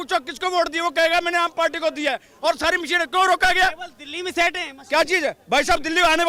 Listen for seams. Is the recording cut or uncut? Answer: uncut